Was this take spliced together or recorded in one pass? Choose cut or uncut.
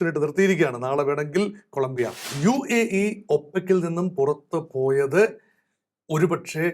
cut